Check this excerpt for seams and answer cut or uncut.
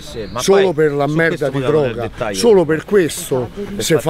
uncut